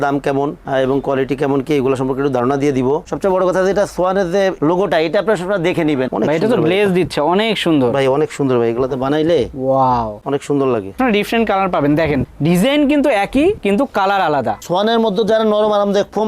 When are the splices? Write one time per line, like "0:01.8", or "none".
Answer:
0:03.1
0:06.1
0:11.0
0:14.6